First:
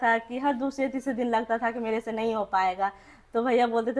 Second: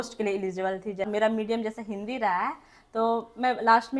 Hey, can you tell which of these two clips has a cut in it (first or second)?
second